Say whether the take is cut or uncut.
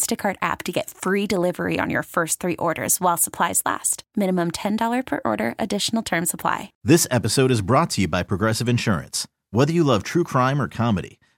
cut